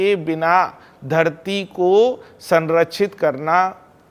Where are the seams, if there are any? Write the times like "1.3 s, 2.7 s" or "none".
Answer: none